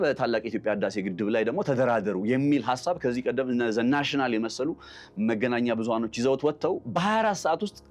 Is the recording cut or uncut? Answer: uncut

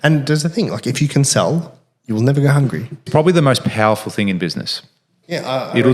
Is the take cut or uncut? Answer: cut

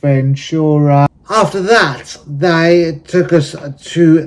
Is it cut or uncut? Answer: cut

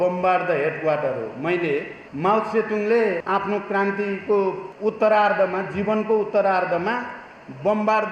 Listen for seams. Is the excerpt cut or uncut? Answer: cut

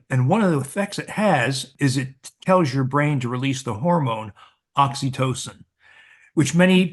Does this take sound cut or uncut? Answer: cut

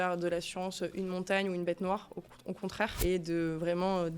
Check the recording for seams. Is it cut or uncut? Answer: cut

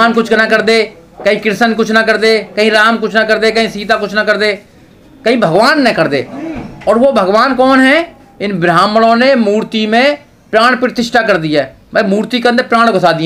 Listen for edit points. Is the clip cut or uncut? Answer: uncut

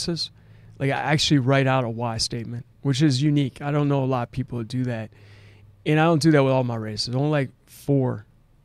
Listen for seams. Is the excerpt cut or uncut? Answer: uncut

